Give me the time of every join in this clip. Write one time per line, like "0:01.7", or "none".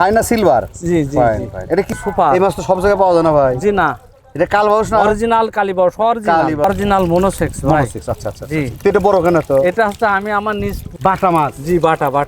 0:02.0
0:06.6
0:10.8

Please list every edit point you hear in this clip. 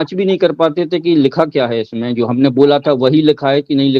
none

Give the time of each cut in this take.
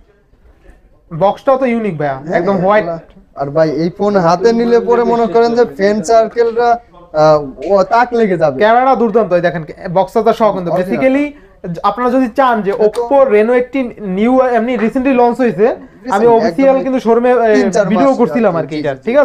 none

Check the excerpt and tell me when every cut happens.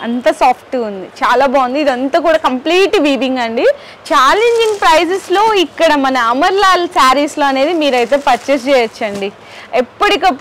0:03.9

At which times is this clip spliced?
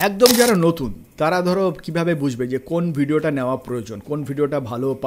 none

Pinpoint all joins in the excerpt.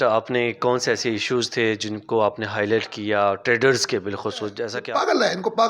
0:04.7

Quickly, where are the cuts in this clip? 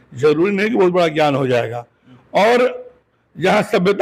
none

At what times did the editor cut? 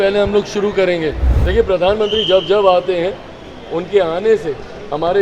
0:01.3

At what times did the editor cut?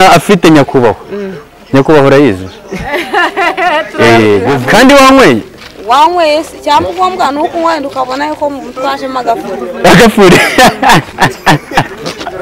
0:04.5

